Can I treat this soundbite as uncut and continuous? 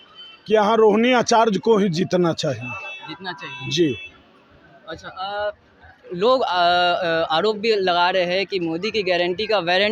yes; 0 cuts

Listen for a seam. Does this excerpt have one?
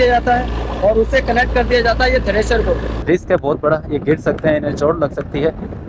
yes; 1 cut; at 3.0 s

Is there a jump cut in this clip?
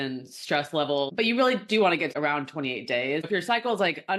yes; 3 cuts; at 1.1 s, 2.1 s, 3.3 s

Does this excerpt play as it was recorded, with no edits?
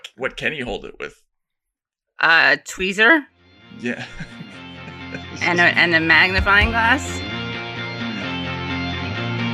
no; 1 cut; at 7.0 s

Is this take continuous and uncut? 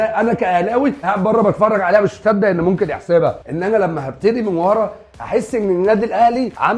no; 1 cut; at 3.4 s

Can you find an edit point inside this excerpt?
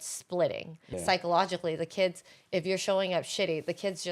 yes; 1 cut; at 0.9 s

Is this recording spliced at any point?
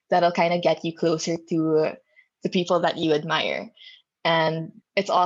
no; 0 cuts

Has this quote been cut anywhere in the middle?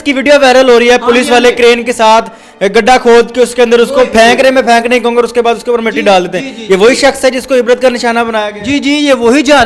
no; 0 cuts

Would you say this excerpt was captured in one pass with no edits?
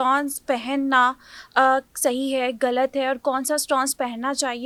yes; 0 cuts

